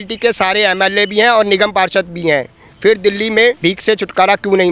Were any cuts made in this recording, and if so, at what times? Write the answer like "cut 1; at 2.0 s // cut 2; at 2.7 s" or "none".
none